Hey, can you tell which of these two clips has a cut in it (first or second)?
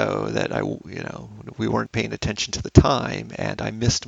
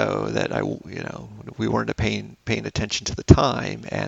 first